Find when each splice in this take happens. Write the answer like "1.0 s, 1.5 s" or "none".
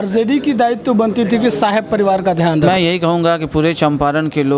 2.6 s